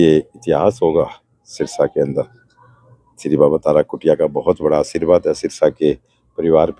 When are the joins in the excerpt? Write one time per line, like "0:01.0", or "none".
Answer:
none